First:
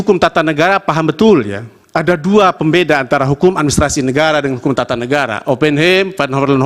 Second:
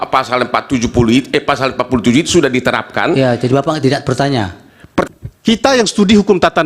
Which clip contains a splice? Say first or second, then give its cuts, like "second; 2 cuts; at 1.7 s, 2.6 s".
second; 1 cut; at 5.0 s